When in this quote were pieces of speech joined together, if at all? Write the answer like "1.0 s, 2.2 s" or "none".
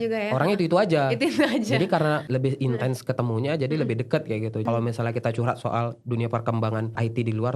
4.6 s